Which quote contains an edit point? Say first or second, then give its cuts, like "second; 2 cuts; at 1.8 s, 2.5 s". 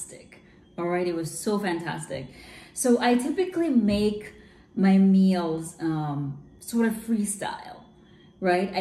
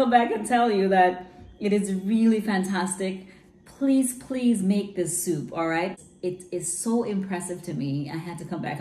second; 1 cut; at 6.0 s